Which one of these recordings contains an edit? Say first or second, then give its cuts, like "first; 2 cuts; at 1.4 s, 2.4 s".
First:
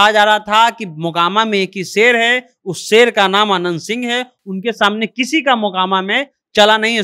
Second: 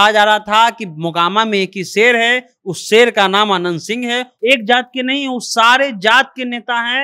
second; 1 cut; at 4.3 s